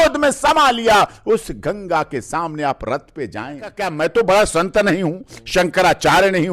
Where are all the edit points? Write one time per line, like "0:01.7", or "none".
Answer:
0:03.8